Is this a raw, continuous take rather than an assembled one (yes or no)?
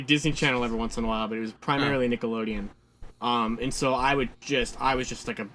yes